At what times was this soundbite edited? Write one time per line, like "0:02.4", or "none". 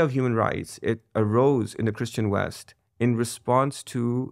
none